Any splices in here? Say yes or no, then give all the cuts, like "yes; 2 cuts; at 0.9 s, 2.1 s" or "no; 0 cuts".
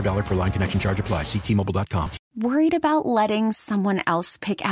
yes; 1 cut; at 2.2 s